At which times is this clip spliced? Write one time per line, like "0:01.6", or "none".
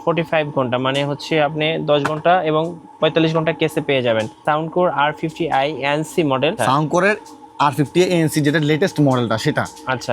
0:04.4
0:06.6